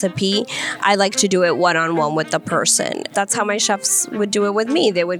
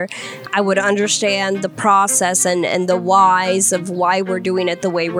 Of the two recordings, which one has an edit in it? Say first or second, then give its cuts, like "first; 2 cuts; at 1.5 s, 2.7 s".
first; 1 cut; at 3.1 s